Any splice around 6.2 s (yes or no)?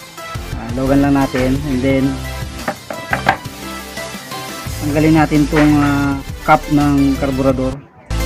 yes